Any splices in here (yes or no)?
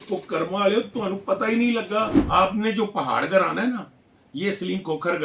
yes